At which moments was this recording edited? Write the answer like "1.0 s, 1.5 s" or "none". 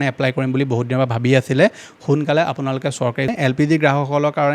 3.3 s